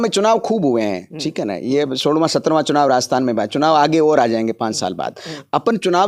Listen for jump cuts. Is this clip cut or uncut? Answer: uncut